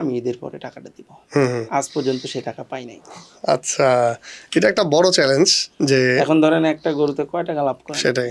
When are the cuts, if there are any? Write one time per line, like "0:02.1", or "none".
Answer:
none